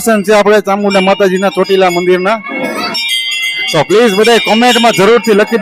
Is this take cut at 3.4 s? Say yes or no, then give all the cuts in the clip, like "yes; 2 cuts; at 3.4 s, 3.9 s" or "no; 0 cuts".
no; 0 cuts